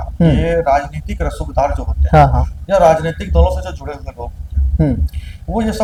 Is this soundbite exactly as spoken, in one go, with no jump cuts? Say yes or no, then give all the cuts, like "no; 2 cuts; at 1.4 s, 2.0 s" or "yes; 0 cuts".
yes; 0 cuts